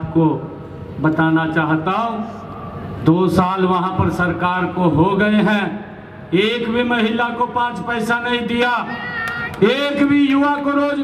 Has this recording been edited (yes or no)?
no